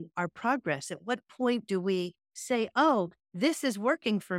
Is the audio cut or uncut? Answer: uncut